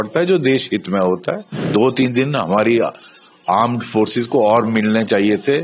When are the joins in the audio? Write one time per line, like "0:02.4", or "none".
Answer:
0:01.7